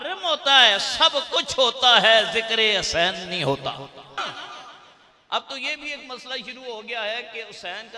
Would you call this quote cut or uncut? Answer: cut